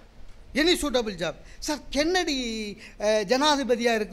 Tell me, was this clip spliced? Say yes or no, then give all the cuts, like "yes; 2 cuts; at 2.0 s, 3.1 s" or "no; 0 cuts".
no; 0 cuts